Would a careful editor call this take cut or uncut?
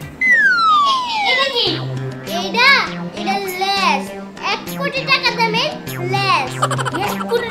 uncut